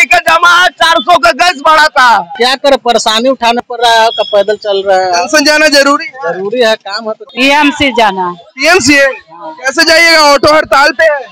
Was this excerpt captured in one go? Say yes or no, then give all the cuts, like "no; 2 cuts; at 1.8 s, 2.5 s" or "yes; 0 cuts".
no; 2 cuts; at 2.3 s, 7.2 s